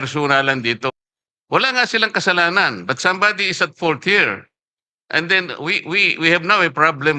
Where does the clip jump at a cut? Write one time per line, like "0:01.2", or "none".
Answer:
0:00.9